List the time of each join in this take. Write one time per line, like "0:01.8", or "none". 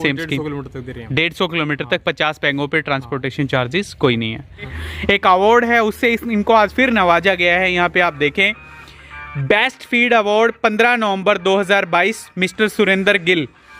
0:04.8

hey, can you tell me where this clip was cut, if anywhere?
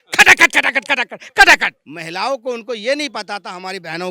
0:01.8

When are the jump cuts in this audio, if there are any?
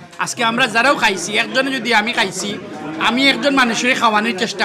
none

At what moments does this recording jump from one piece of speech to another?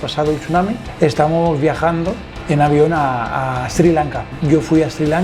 none

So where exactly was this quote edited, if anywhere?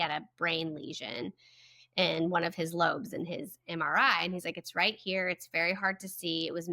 none

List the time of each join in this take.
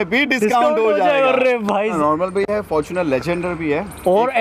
0:02.0

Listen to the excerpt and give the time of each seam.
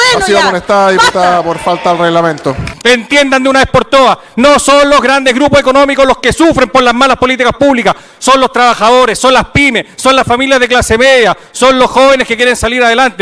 0:02.7

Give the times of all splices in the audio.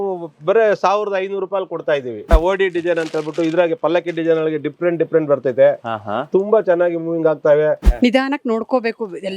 0:02.3
0:07.8

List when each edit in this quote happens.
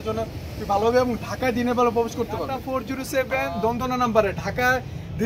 0:02.7

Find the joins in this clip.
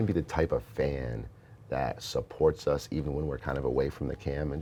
none

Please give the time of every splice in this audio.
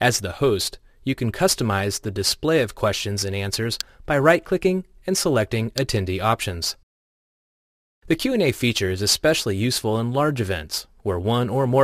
none

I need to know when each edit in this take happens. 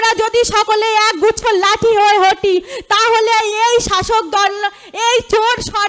none

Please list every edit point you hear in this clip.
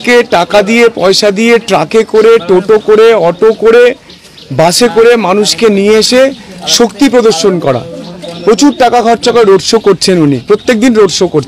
none

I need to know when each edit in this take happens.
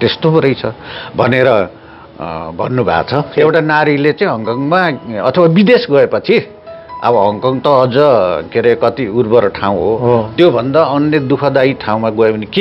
0:03.4

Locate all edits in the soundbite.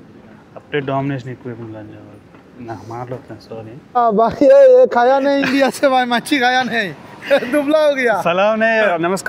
0:04.0

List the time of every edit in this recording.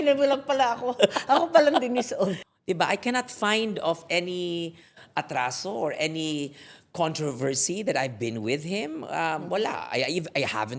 0:02.4

